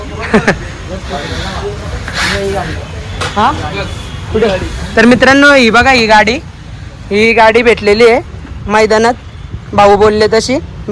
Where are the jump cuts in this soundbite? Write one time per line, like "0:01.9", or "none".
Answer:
none